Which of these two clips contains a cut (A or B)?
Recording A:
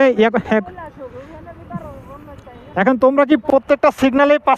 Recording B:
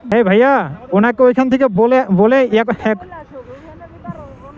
A